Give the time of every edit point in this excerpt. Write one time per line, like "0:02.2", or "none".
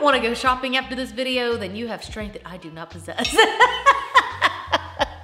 none